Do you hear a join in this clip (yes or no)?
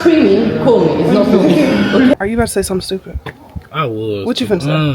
yes